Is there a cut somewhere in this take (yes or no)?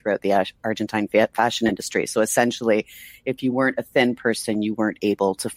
no